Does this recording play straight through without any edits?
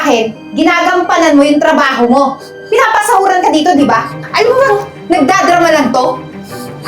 no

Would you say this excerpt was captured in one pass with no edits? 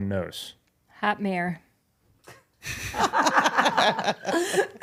yes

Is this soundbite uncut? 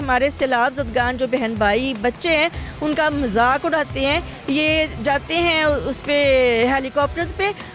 yes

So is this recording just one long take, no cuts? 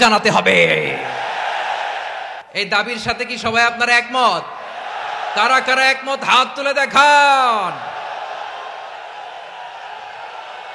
no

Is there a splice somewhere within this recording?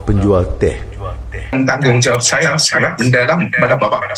yes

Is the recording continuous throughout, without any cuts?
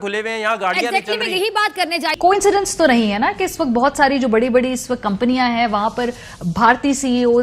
no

